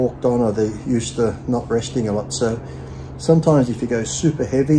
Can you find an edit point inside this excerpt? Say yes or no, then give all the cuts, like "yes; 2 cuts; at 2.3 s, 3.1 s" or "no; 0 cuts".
no; 0 cuts